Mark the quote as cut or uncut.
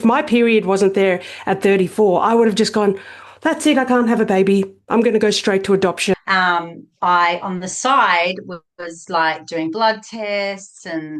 cut